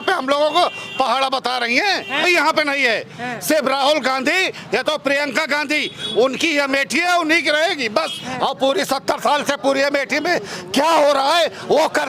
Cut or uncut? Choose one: cut